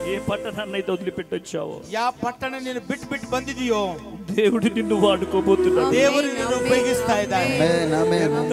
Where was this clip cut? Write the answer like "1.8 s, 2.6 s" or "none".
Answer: none